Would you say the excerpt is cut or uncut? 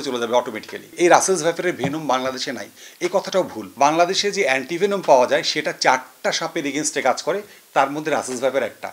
cut